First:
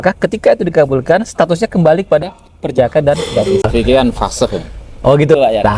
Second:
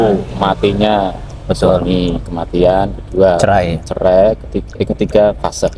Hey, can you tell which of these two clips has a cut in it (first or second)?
first